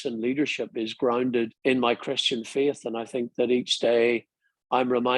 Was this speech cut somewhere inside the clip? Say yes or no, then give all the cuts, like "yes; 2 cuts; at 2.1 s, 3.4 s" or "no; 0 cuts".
yes; 1 cut; at 1.5 s